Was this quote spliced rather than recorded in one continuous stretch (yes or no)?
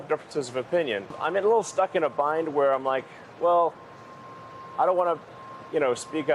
yes